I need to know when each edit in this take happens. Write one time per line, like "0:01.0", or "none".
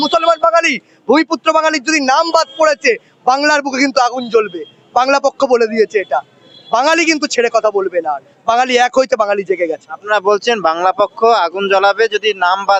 none